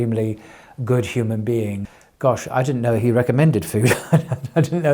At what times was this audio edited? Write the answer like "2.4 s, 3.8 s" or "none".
1.9 s